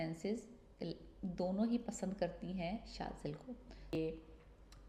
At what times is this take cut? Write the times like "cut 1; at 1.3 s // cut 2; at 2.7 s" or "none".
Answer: cut 1; at 4.0 s